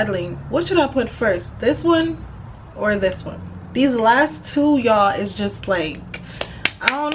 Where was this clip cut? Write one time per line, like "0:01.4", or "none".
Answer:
none